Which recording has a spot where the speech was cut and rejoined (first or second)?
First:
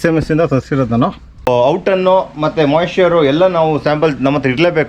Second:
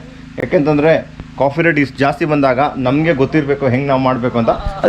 first